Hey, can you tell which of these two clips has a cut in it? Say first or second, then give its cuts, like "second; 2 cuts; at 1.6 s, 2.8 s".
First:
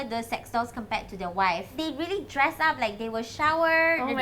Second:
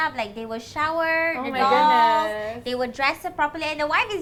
first; 1 cut; at 1.7 s